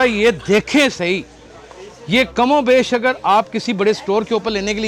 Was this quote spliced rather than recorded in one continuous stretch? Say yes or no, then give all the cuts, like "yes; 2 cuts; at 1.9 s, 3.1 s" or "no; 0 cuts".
no; 0 cuts